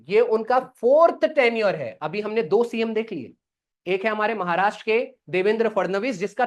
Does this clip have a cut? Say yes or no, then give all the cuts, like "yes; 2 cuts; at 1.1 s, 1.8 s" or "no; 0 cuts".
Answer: no; 0 cuts